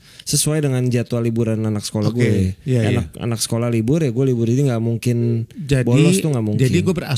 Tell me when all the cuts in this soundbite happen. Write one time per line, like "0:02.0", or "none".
none